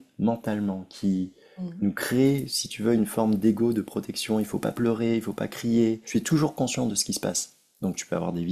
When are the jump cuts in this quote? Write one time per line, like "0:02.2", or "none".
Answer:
0:06.0